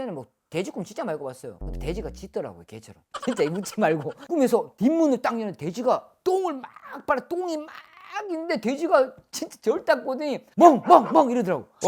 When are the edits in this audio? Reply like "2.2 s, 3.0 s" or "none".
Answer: none